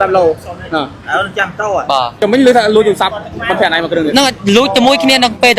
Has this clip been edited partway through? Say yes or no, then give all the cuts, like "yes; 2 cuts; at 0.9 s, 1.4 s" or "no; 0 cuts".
no; 0 cuts